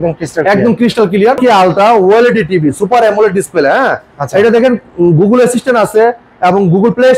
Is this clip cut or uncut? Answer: cut